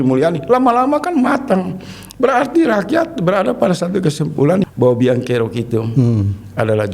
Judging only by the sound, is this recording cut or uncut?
cut